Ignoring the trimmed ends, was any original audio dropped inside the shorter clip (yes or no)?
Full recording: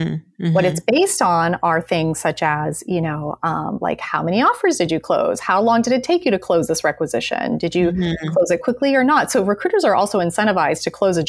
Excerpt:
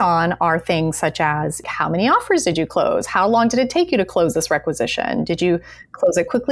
yes